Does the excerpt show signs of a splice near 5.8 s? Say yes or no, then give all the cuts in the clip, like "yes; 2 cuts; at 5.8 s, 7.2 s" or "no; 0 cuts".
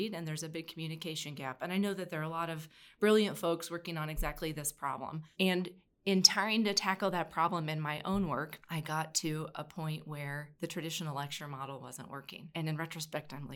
no; 2 cuts; at 8.6 s, 10.5 s